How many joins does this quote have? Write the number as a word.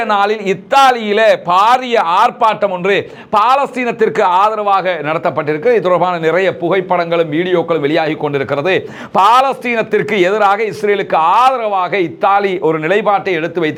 zero